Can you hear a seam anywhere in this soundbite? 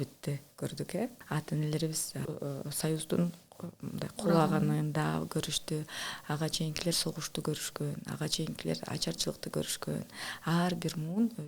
yes; 2 cuts; at 1.2 s, 2.2 s

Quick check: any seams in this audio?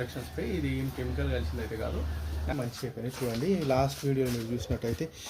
yes; 1 cut; at 2.5 s

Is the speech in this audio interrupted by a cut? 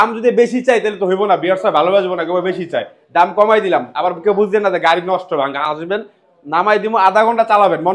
no; 0 cuts

